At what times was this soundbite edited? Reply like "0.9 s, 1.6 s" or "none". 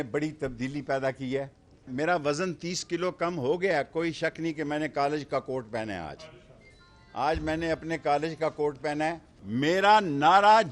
1.9 s, 9.3 s